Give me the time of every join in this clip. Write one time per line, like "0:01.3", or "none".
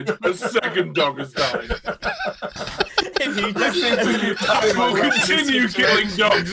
none